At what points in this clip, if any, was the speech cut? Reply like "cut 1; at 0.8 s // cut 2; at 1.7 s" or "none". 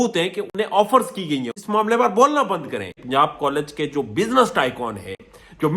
cut 1; at 1.5 s // cut 2; at 3.0 s